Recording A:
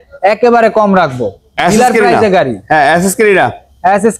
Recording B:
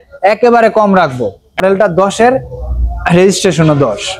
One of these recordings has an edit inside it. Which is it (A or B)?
B